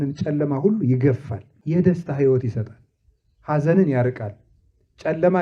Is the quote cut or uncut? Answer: cut